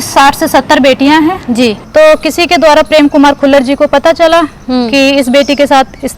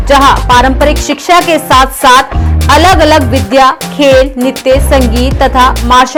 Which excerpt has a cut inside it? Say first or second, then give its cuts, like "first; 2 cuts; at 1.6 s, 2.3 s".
first; 1 cut; at 1.8 s